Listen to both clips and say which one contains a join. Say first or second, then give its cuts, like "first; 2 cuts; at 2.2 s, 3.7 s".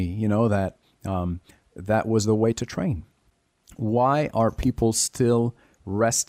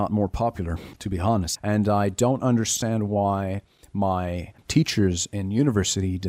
second; 2 cuts; at 1.5 s, 4.6 s